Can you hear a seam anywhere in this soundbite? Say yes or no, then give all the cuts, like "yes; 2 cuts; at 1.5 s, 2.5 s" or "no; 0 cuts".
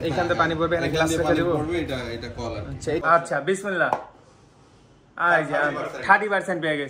yes; 1 cut; at 3.0 s